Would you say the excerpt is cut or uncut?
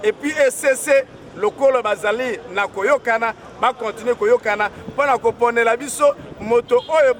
uncut